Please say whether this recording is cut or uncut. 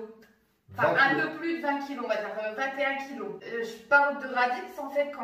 cut